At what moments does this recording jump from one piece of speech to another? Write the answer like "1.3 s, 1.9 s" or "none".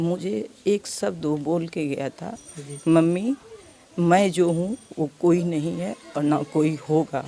none